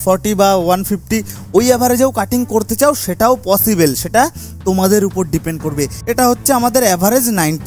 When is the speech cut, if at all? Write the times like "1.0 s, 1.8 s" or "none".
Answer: 6.0 s

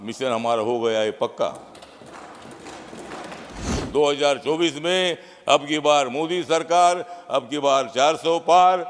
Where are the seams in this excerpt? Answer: 3.7 s

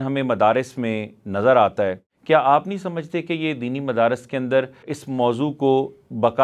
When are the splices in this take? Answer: 2.1 s, 4.9 s

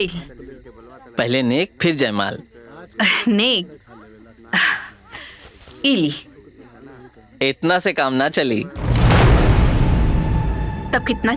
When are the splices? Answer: none

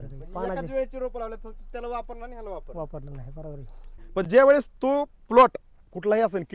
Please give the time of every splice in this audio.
4.0 s

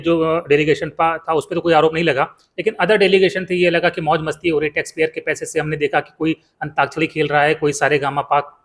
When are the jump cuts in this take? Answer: none

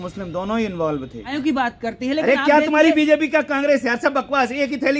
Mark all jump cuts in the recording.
1.3 s

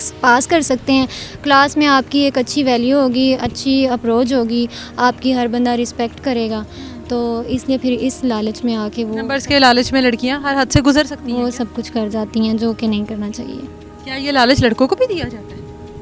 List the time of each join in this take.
none

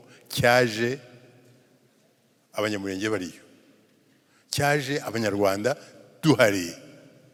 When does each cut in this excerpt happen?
none

